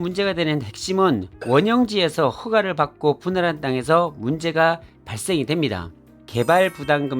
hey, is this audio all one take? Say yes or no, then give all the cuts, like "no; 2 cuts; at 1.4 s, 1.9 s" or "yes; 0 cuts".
no; 1 cut; at 6.1 s